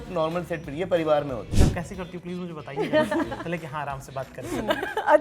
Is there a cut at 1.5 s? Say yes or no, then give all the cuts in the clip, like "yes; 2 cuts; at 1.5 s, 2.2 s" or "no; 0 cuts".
yes; 1 cut; at 1.5 s